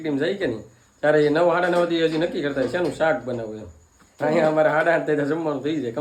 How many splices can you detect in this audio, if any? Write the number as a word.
zero